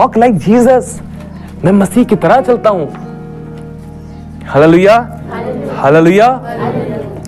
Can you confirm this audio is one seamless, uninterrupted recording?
yes; 0 cuts

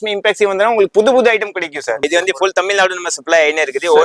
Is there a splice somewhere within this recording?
yes; 1 cut; at 2.0 s

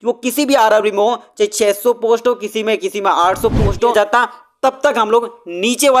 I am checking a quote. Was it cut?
yes; 1 cut; at 3.9 s

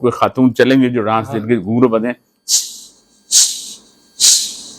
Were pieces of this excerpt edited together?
no; 0 cuts

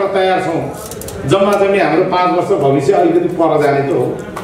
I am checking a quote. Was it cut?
no; 0 cuts

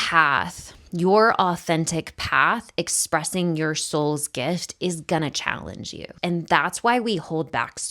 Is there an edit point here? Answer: yes; 1 cut; at 6.1 s

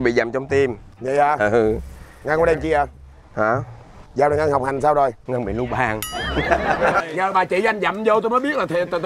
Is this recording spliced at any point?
yes; 1 cut; at 7.0 s

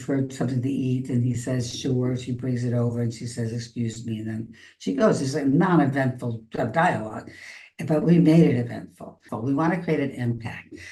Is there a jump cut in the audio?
yes; 1 cut; at 9.3 s

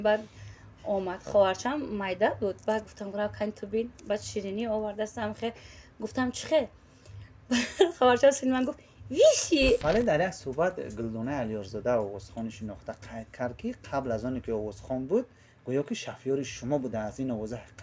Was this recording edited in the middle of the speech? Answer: yes; 1 cut; at 9.8 s

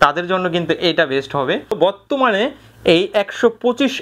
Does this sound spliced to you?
yes; 1 cut; at 1.8 s

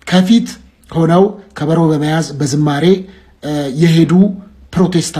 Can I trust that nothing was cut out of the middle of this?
yes; 0 cuts

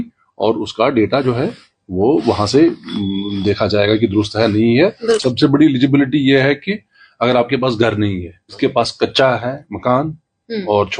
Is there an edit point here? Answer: yes; 2 cuts; at 5.2 s, 8.5 s

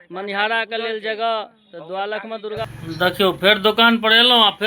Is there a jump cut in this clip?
yes; 1 cut; at 2.6 s

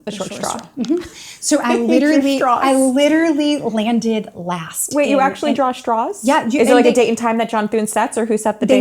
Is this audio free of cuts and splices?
yes; 0 cuts

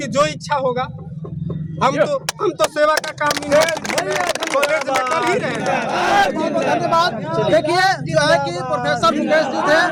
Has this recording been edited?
no; 0 cuts

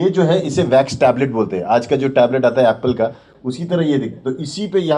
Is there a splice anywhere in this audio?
no; 0 cuts

